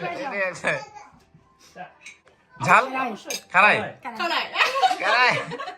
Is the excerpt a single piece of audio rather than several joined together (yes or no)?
no